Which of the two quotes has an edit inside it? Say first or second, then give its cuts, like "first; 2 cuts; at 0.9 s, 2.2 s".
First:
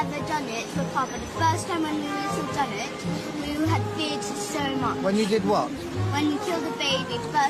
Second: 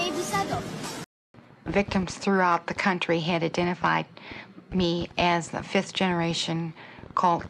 second; 1 cut; at 1.0 s